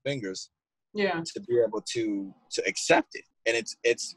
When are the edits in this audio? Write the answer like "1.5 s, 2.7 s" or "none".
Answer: 3.2 s